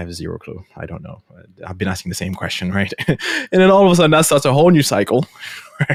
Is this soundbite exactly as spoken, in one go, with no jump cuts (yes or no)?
yes